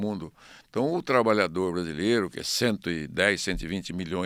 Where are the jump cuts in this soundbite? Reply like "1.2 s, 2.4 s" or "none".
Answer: none